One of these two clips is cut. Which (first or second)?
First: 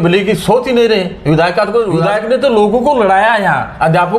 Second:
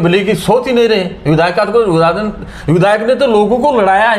first